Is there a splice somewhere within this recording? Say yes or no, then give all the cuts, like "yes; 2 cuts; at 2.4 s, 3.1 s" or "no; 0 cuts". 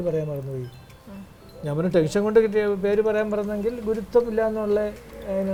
no; 0 cuts